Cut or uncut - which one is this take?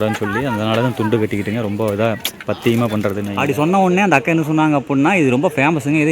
cut